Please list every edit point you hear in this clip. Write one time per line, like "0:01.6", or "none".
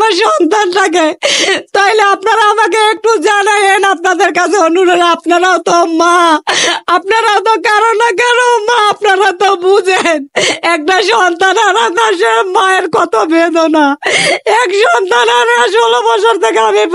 none